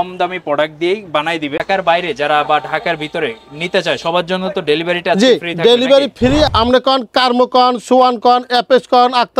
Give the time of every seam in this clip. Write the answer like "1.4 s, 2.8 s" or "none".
1.6 s, 6.5 s